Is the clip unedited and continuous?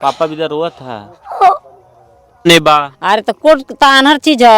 no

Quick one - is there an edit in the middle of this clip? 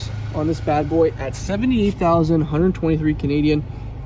no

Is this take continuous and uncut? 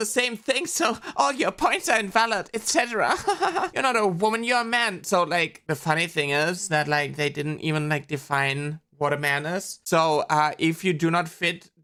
yes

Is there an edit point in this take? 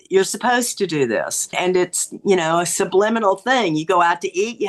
yes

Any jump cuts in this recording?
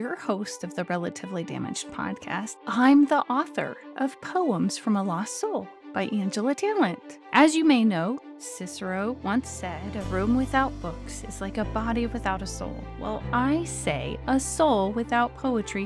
no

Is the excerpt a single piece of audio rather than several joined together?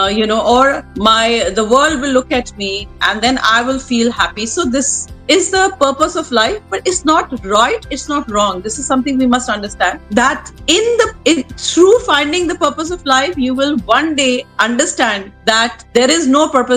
yes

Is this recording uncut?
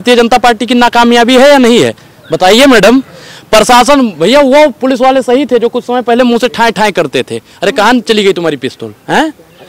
yes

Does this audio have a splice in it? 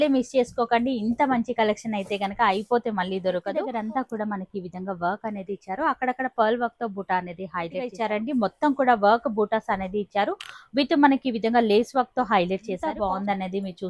yes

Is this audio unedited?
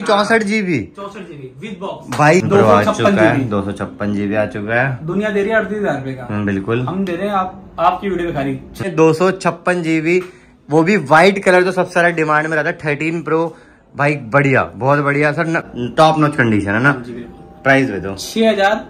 no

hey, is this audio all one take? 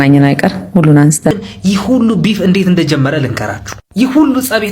no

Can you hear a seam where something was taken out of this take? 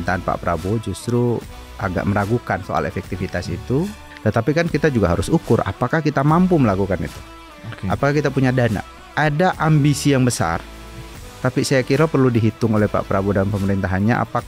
yes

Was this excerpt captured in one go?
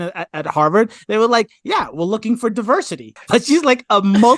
no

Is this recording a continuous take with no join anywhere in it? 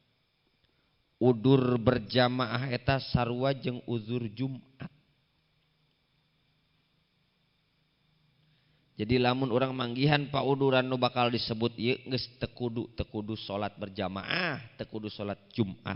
yes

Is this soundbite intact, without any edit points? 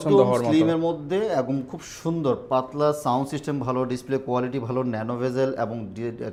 yes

